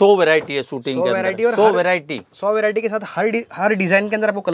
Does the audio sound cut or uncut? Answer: uncut